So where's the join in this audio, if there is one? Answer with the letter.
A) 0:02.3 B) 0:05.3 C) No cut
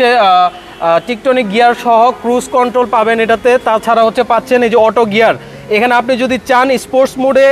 C